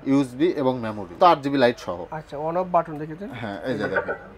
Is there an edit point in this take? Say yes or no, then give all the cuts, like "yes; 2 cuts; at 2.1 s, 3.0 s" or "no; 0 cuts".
yes; 1 cut; at 1.1 s